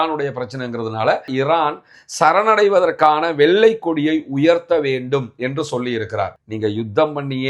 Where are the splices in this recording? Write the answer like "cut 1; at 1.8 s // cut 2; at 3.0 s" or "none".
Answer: cut 1; at 1.3 s